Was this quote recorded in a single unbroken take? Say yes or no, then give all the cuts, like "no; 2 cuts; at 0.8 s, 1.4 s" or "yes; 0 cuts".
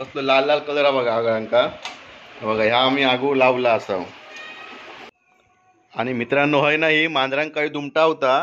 no; 1 cut; at 5.1 s